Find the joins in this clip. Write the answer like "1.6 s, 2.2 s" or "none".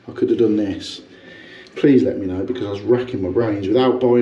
none